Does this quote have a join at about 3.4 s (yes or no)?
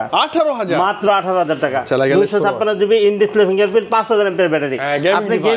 no